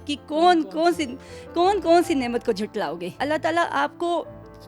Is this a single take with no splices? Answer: no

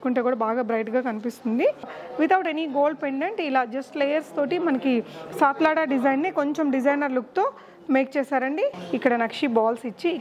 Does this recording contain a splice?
yes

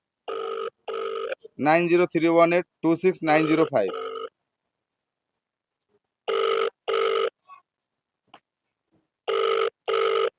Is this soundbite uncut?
yes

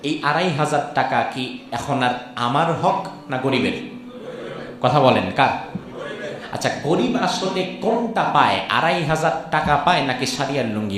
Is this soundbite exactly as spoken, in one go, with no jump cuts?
yes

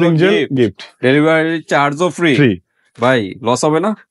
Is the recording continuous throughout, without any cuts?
yes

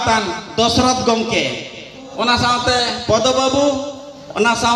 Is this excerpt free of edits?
no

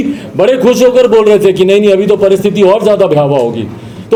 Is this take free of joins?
yes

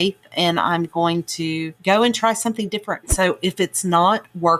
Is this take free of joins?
no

